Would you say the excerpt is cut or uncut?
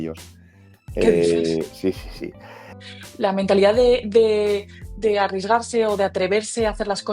cut